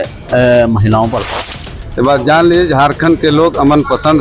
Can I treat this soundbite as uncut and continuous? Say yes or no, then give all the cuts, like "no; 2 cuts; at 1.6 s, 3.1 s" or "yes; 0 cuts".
no; 1 cut; at 1.3 s